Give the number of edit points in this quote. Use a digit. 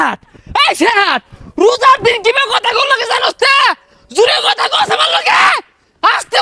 0